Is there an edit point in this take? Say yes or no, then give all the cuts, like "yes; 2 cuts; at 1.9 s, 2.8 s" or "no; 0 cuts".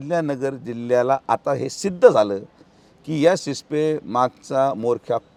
no; 0 cuts